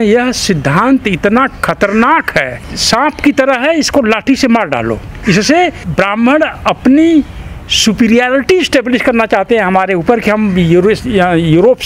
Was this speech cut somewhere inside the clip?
yes; 3 cuts; at 2.5 s, 5.1 s, 5.8 s

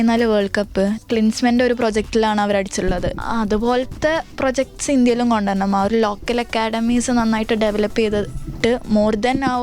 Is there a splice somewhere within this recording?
yes; 2 cuts; at 1.0 s, 3.1 s

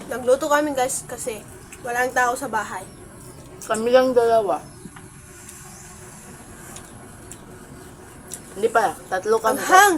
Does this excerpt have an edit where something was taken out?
no; 0 cuts

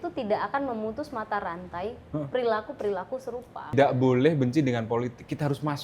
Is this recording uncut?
no; 1 cut; at 3.7 s

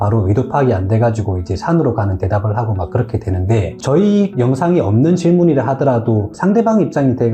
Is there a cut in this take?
yes; 2 cuts; at 3.7 s, 6.3 s

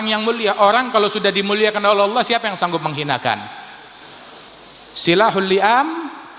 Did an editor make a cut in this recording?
yes; 1 cut; at 4.4 s

